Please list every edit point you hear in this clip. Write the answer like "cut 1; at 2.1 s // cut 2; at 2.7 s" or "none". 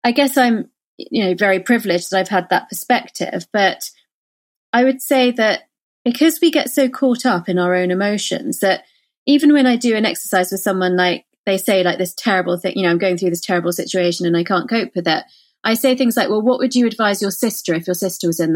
none